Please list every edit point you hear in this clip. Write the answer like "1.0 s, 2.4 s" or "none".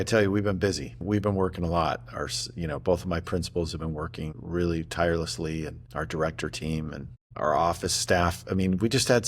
1.0 s, 4.4 s, 5.8 s, 7.3 s